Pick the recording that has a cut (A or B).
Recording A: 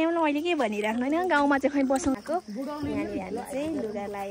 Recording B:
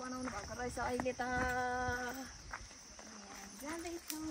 A